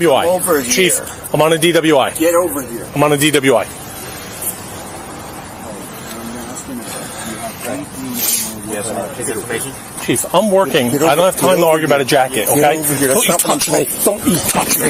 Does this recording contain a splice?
no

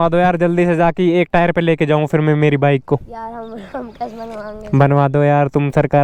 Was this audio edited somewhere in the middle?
no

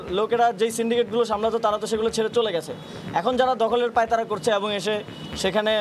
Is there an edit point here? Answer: no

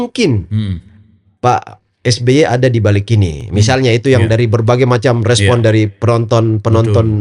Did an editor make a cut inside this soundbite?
no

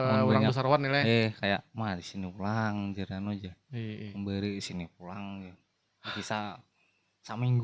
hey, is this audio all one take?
yes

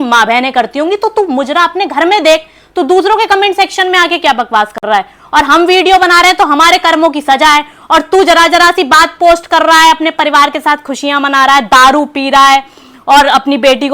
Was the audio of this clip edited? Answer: no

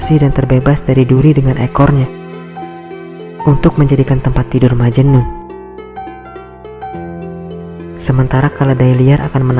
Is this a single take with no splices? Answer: yes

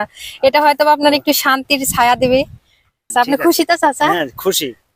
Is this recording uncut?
no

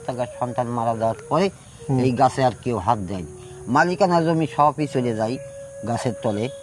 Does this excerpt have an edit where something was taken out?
no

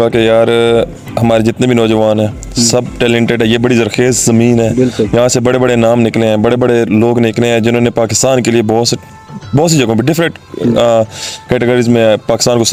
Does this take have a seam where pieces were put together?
no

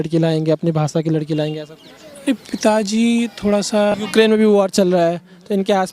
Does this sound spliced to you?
yes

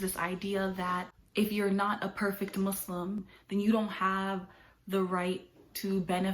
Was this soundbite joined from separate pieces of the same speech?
yes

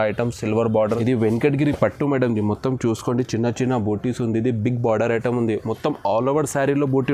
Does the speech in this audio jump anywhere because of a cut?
yes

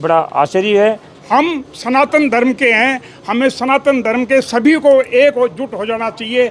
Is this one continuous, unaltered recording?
no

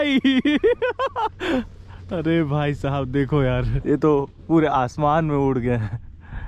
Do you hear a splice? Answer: yes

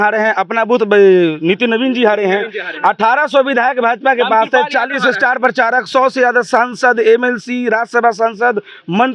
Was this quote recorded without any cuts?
yes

